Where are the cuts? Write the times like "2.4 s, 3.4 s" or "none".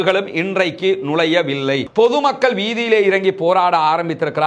1.9 s